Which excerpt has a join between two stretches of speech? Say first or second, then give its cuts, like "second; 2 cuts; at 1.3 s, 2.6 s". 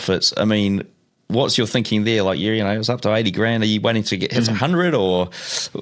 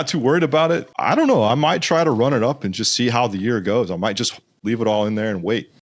second; 2 cuts; at 0.9 s, 4.6 s